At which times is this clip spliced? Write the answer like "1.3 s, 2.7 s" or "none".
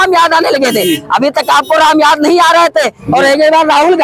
3.0 s